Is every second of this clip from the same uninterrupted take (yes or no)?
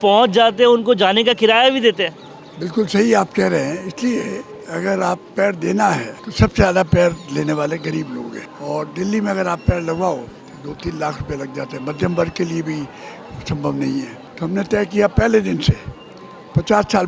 no